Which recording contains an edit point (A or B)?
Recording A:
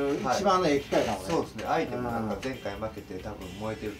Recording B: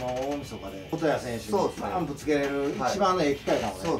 B